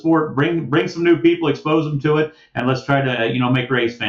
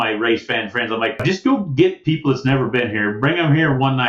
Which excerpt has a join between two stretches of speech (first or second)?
second